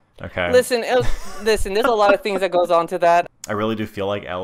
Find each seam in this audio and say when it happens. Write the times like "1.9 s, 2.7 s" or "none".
3.3 s